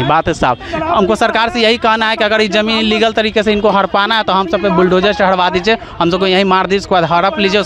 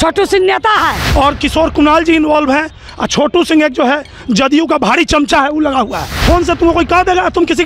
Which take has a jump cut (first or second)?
second